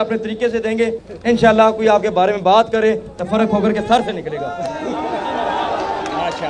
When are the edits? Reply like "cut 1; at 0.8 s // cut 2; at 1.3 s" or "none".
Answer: cut 1; at 1.0 s

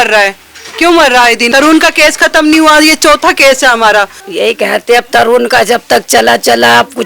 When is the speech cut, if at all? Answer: cut 1; at 1.5 s // cut 2; at 4.2 s

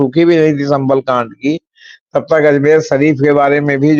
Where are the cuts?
none

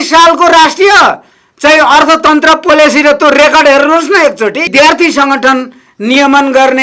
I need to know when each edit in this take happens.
cut 1; at 4.7 s

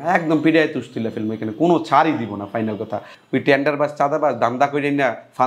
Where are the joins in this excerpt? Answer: cut 1; at 3.1 s

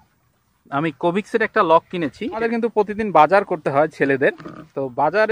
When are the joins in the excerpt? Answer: cut 1; at 2.4 s

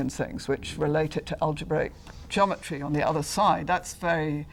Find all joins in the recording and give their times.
none

